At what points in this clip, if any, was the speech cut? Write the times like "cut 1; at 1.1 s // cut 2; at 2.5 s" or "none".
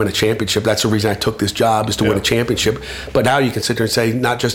none